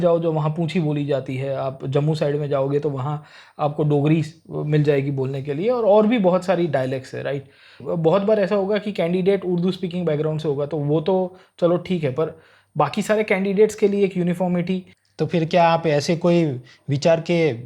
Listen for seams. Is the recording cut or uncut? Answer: cut